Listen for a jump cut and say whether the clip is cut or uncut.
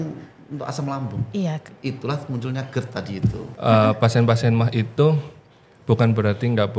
cut